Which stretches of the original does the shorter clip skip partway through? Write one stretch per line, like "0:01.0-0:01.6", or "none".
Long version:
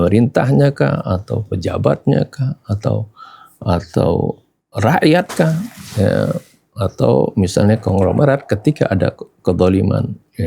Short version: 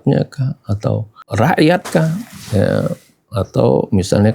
0:03.2-0:04.6